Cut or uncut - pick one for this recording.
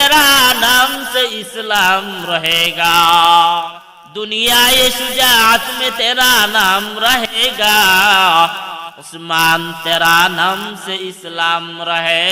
cut